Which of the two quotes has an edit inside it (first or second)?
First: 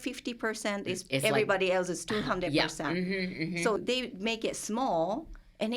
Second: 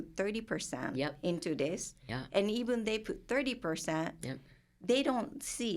first